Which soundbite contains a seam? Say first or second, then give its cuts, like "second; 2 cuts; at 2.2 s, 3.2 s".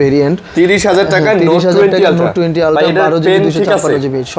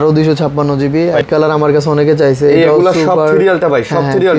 second; 1 cut; at 1.3 s